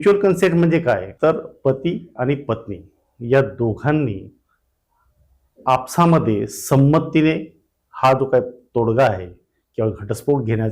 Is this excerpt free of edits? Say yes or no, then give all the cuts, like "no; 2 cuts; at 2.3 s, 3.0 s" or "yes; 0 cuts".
no; 1 cut; at 1.1 s